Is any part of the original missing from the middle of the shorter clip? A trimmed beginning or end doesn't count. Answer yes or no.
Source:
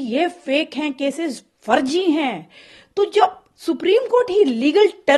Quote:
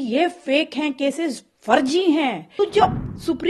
yes